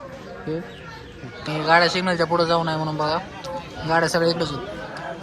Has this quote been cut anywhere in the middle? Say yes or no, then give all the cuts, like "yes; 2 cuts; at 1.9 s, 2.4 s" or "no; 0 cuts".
yes; 1 cut; at 1.5 s